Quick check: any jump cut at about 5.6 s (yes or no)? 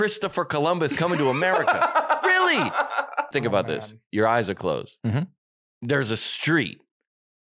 no